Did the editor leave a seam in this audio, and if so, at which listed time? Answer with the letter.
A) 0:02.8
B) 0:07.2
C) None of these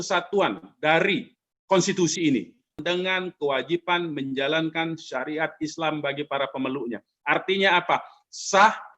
A